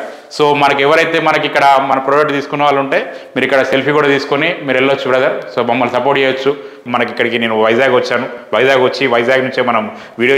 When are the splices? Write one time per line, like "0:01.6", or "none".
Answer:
0:06.8